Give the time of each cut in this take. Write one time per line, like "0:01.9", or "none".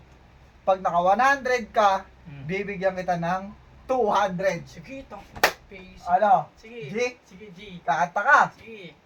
none